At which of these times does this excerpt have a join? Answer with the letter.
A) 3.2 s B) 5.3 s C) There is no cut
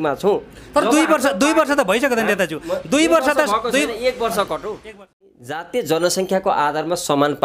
B